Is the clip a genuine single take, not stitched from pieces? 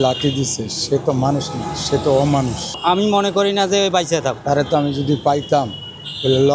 no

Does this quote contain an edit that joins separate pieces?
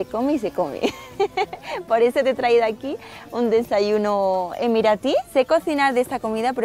yes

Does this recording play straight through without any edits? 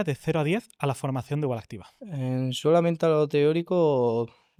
yes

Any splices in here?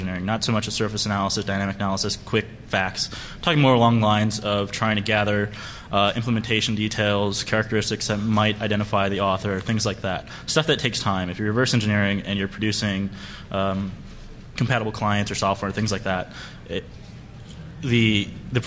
yes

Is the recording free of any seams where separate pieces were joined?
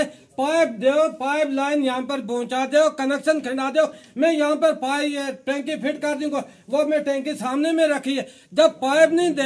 yes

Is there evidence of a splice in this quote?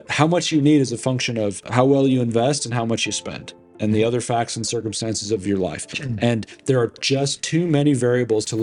no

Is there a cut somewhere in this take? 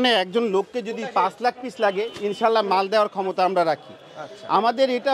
no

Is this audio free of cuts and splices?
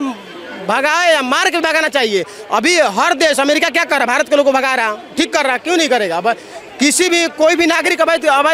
yes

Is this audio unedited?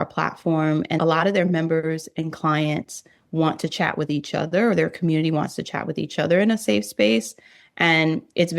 no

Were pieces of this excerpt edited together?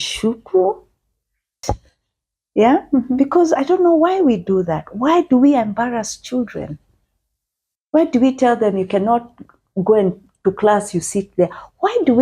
yes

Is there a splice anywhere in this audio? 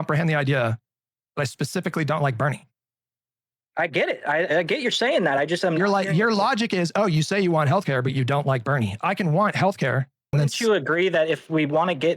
yes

